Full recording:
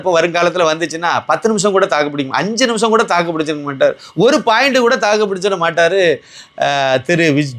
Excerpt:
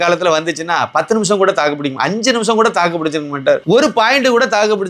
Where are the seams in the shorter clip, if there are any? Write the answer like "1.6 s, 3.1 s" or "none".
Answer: 3.6 s